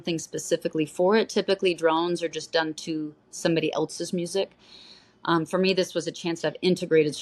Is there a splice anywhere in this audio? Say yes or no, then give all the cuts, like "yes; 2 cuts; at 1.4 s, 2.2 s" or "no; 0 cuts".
no; 0 cuts